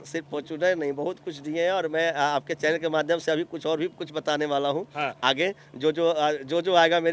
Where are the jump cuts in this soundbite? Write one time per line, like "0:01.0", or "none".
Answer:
none